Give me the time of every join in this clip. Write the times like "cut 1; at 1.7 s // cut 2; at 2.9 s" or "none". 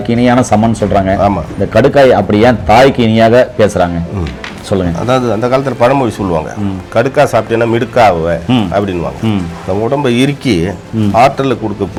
none